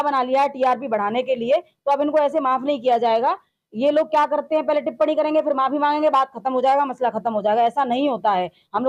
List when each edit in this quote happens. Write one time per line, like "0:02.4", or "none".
none